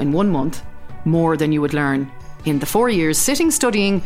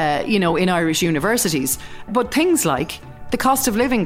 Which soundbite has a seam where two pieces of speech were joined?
second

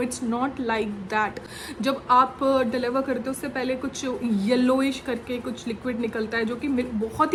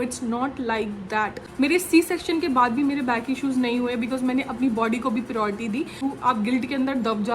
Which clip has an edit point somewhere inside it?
second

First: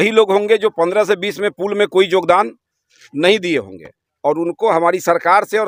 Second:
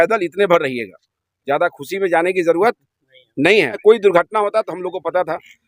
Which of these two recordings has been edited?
second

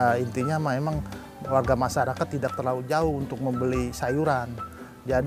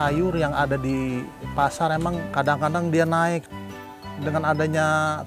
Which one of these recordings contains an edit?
second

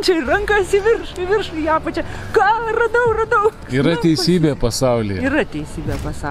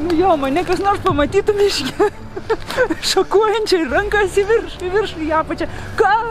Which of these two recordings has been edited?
first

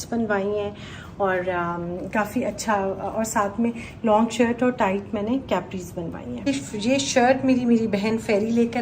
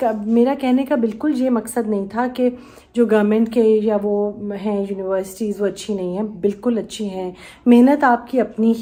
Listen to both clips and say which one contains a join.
first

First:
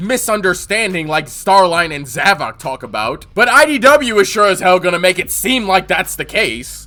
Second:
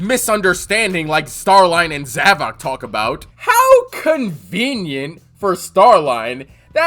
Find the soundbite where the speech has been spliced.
second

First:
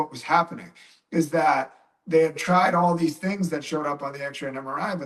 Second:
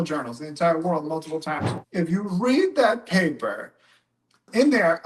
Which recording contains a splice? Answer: second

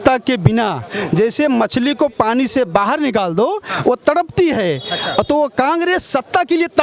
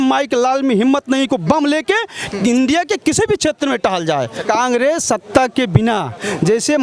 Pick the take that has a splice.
second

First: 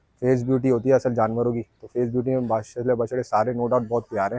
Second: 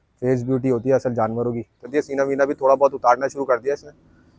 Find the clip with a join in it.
second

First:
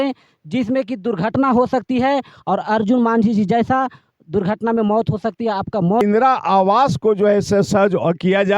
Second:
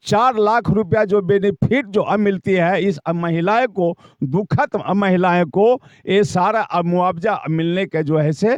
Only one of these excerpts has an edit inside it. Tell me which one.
first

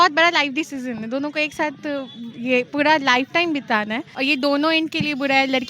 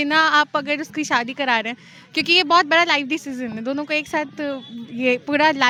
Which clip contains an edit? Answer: first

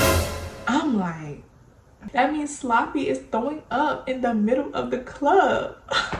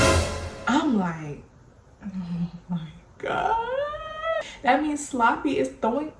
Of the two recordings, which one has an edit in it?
first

